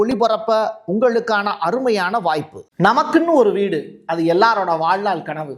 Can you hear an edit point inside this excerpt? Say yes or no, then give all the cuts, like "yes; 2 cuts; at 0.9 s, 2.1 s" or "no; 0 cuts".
yes; 1 cut; at 2.6 s